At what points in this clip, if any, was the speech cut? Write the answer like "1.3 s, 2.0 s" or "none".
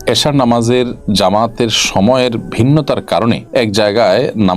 1.0 s, 3.4 s